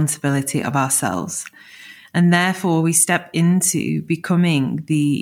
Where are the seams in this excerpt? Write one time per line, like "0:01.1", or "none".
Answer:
none